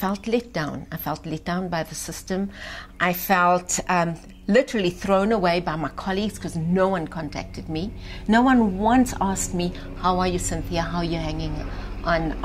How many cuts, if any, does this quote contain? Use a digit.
0